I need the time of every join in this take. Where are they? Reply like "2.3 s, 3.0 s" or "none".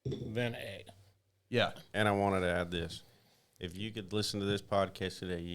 1.8 s